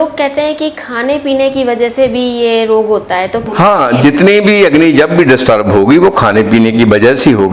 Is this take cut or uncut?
cut